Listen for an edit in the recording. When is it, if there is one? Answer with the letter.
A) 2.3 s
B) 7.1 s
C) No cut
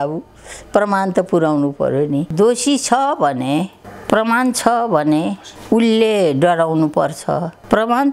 A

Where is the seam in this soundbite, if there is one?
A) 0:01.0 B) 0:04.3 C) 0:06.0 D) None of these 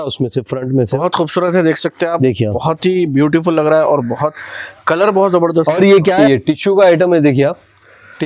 C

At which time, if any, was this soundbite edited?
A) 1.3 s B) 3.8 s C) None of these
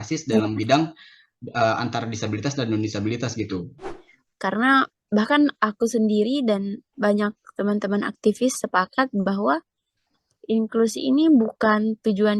B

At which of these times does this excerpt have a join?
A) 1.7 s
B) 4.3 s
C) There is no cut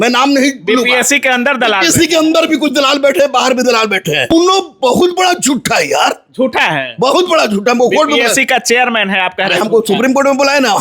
B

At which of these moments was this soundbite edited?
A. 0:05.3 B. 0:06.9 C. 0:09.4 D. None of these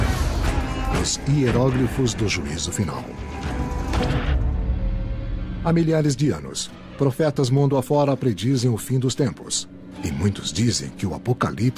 D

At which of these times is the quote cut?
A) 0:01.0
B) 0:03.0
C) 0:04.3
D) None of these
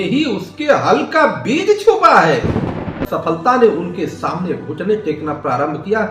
B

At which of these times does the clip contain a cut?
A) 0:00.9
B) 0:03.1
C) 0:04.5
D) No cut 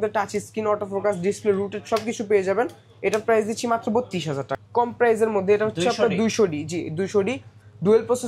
C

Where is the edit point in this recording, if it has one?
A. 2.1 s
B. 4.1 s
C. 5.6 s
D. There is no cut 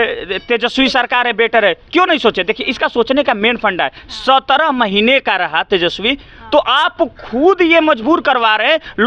D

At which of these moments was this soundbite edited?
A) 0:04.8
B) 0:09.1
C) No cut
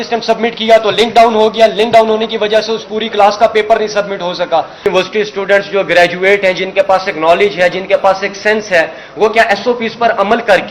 A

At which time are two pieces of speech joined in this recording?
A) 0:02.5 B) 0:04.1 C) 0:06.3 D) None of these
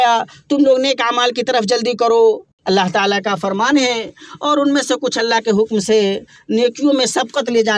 A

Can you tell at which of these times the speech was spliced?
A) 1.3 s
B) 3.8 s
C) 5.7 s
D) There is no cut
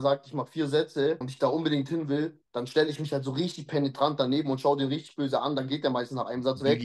A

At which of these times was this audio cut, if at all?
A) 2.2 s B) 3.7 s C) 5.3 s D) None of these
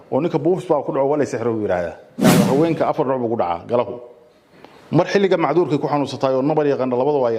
A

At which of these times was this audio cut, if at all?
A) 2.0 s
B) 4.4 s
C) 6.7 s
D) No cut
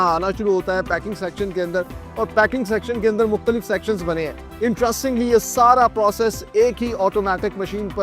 B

